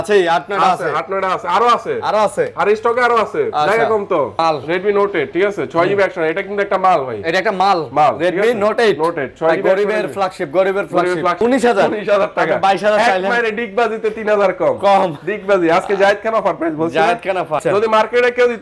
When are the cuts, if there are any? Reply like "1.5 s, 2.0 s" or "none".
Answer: 4.3 s, 11.4 s, 17.6 s

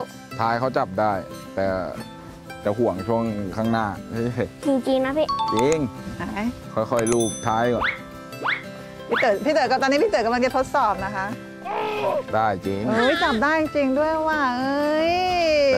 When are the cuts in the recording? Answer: none

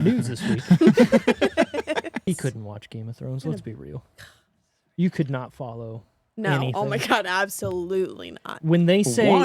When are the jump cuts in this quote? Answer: 2.3 s

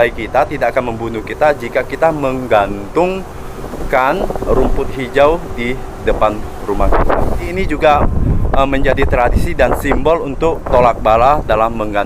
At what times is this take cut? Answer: 7.5 s, 10.6 s

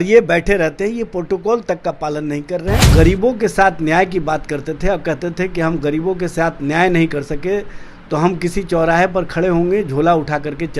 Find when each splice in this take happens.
2.9 s

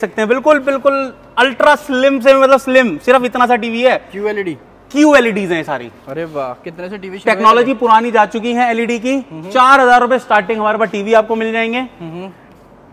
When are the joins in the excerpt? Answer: none

